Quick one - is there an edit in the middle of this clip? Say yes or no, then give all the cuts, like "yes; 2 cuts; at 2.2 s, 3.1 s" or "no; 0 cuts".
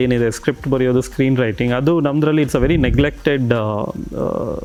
no; 0 cuts